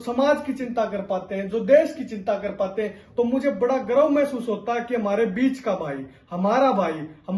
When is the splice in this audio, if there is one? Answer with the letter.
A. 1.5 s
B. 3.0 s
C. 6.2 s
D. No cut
B